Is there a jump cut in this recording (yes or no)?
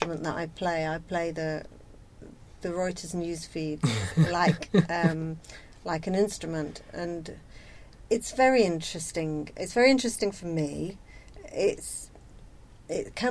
no